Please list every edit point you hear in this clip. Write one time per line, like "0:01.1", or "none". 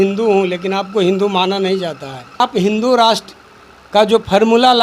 0:02.4